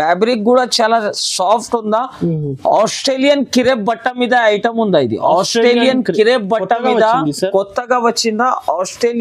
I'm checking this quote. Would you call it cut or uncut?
uncut